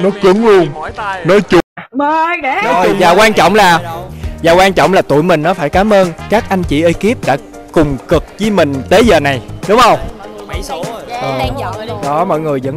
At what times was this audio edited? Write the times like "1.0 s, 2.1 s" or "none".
2.8 s